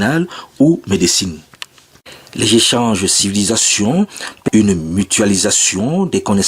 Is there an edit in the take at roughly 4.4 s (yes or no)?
yes